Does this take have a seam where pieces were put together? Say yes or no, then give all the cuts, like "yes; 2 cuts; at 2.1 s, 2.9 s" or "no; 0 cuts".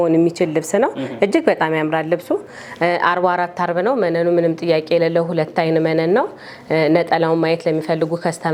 no; 0 cuts